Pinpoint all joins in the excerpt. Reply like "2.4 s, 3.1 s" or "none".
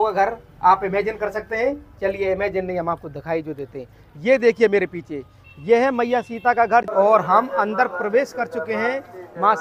6.9 s